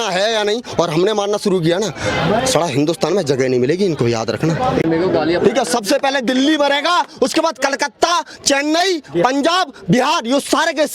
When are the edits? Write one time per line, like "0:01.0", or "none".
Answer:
0:04.8